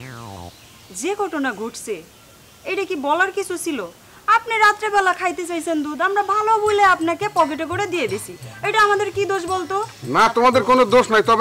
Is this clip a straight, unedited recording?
yes; 0 cuts

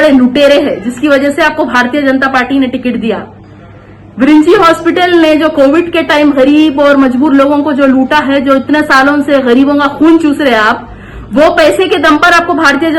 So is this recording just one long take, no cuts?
yes; 0 cuts

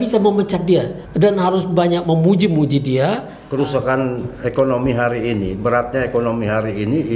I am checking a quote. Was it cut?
yes; 2 cuts; at 1.0 s, 3.4 s

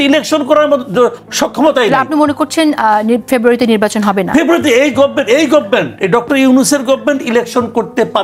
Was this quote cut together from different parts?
no; 0 cuts

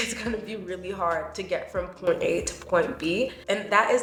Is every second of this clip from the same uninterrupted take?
yes; 0 cuts

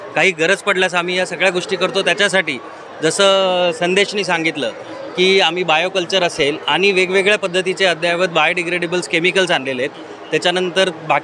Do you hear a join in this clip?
no; 0 cuts

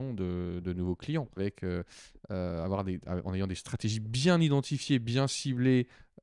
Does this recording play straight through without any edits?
no; 1 cut; at 1.4 s

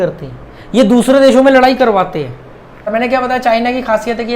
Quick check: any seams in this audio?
yes; 1 cut; at 2.9 s

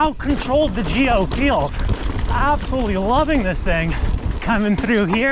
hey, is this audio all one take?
yes; 0 cuts

